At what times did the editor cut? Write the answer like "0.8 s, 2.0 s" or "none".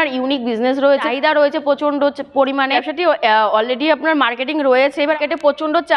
1.1 s, 2.8 s, 5.1 s